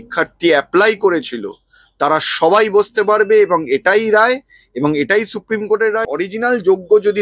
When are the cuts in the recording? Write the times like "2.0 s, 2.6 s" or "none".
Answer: 6.0 s